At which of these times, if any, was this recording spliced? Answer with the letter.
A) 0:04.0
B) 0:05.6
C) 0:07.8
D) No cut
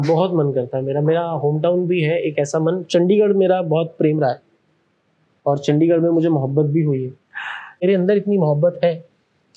C